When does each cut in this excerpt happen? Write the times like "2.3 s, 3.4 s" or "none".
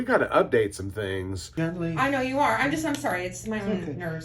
1.5 s